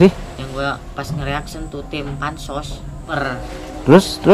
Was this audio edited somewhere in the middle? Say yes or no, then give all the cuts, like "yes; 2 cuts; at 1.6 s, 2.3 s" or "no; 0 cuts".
yes; 1 cut; at 3.1 s